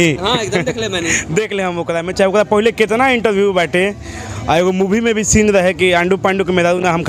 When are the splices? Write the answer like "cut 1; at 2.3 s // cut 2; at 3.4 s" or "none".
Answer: none